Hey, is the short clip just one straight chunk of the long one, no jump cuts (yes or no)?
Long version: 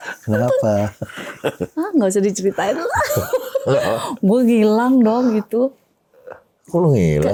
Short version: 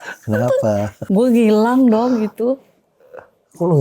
no